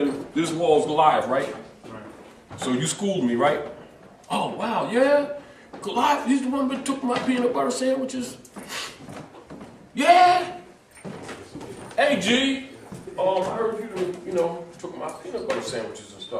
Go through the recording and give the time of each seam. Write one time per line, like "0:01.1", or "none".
0:07.0